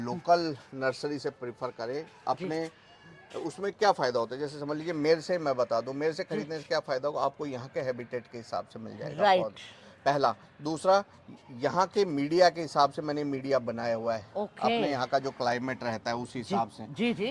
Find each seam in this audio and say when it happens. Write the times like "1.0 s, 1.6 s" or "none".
none